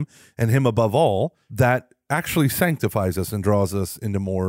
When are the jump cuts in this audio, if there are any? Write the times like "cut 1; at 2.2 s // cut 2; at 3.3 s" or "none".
cut 1; at 1.4 s